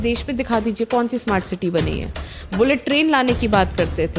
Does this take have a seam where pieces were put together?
no; 0 cuts

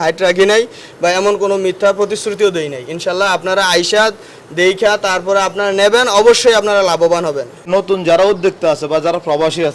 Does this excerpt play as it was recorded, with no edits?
no; 1 cut; at 7.7 s

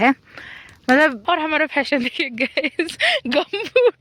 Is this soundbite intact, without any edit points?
no; 1 cut; at 1.2 s

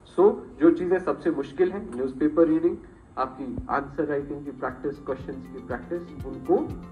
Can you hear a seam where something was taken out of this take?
no; 0 cuts

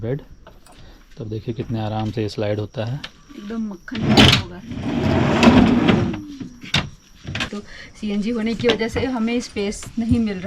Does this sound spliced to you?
yes; 1 cut; at 7.5 s

